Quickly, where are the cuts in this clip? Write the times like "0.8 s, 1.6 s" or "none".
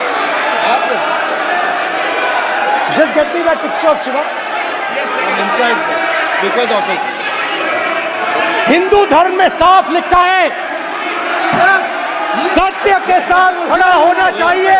none